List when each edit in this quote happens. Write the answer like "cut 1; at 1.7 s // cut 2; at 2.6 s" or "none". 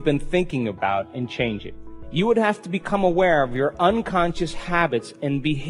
cut 1; at 1.7 s